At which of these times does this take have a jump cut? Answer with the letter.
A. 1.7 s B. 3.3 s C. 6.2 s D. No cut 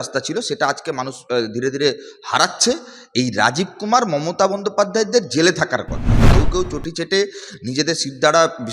C